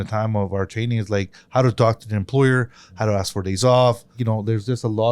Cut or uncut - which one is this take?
cut